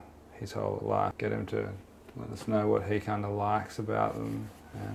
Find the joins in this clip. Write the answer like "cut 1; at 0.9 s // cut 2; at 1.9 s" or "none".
cut 1; at 1.2 s